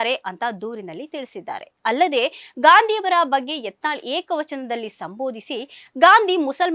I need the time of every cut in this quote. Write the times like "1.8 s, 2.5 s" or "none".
none